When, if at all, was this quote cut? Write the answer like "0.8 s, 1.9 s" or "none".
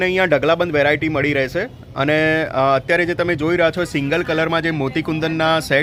none